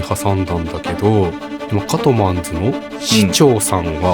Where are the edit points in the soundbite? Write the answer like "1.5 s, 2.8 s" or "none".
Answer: none